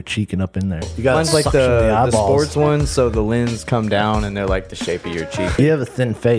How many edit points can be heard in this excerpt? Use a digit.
2